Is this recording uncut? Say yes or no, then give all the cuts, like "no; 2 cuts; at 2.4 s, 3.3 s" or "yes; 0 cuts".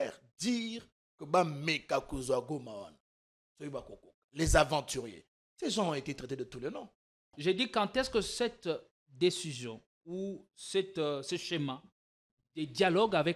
no; 1 cut; at 7.3 s